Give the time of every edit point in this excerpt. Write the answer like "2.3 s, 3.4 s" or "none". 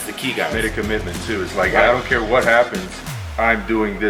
none